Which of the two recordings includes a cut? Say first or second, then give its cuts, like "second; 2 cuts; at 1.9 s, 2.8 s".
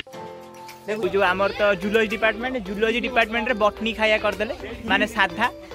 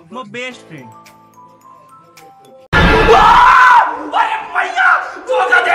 first; 1 cut; at 1.0 s